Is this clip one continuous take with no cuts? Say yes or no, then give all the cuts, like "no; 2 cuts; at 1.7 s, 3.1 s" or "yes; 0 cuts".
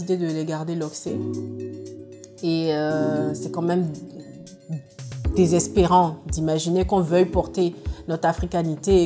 yes; 0 cuts